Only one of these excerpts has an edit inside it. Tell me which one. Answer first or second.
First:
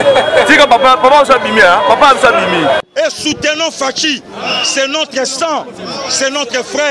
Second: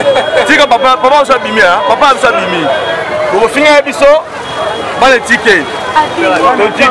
first